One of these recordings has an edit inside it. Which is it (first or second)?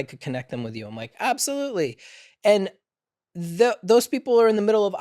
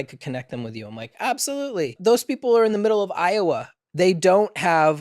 second